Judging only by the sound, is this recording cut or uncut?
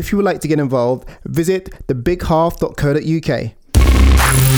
uncut